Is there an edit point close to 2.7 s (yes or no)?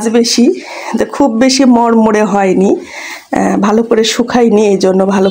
no